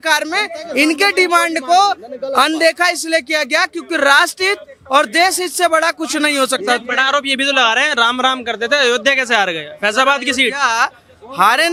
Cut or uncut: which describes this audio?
uncut